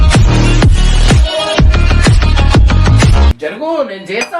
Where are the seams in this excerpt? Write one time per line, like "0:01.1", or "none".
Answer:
0:03.4